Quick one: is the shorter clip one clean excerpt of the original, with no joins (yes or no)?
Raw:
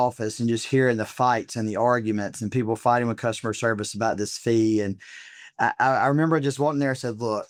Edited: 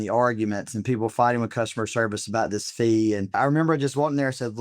no